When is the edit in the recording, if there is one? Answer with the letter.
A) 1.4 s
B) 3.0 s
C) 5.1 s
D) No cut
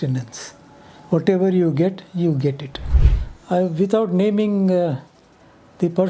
B